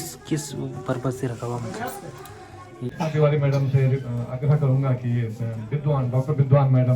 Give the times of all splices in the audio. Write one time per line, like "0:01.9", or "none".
0:02.9